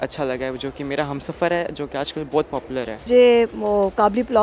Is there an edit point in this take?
yes; 1 cut; at 3.1 s

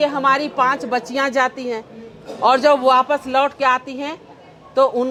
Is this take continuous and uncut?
yes; 0 cuts

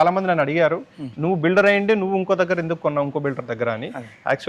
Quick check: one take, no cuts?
yes; 0 cuts

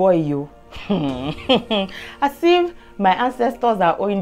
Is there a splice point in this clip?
no; 0 cuts

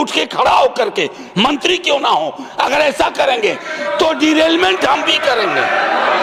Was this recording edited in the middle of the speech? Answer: no; 0 cuts

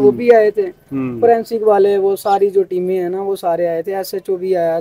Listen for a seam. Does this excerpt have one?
no; 0 cuts

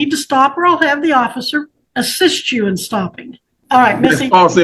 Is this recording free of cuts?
no; 2 cuts; at 1.8 s, 3.5 s

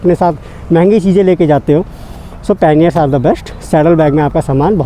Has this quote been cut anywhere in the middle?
no; 0 cuts

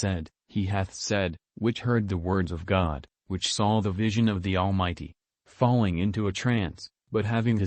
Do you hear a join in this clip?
yes; 1 cut; at 3.1 s

